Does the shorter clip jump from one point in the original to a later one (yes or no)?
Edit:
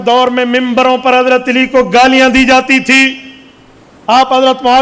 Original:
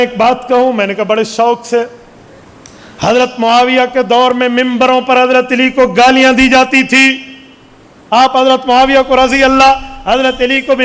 no